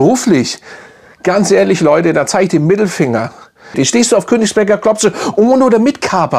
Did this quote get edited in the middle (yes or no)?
yes